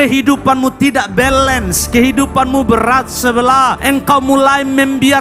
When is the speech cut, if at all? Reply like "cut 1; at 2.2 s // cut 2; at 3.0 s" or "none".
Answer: none